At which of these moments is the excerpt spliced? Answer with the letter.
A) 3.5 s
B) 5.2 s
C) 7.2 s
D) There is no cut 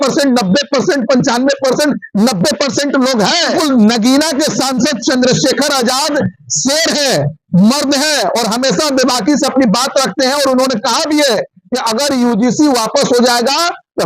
A